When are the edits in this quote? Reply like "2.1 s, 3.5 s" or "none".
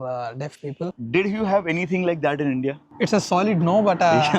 1.0 s

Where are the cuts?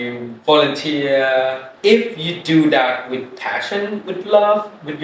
none

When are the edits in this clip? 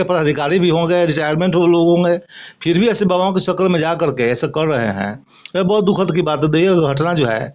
none

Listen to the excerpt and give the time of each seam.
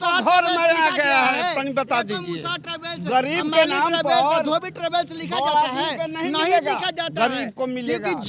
none

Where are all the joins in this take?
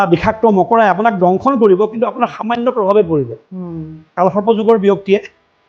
4.1 s

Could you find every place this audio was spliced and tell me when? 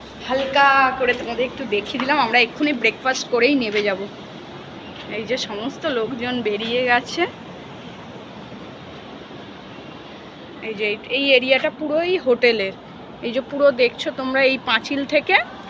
none

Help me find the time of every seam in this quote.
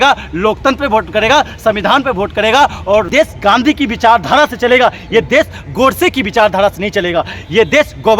3.1 s

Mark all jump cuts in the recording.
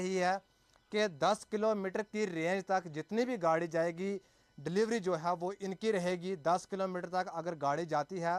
none

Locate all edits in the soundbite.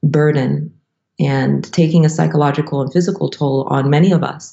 1.7 s

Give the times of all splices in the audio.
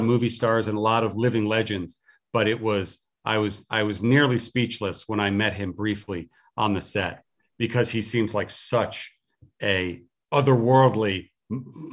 10.1 s

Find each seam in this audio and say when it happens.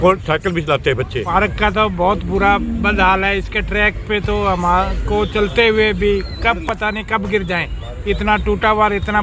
1.3 s

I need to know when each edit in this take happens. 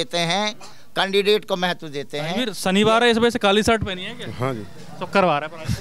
2.5 s

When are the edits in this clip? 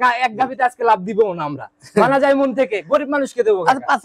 none

